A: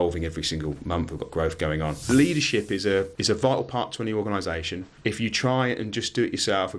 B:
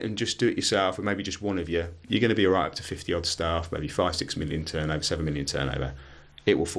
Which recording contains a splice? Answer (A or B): A